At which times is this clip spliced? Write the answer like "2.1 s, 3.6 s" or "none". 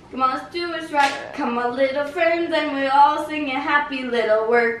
none